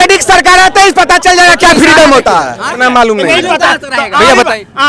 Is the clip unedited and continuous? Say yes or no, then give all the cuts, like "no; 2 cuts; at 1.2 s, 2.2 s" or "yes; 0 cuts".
no; 1 cut; at 2.8 s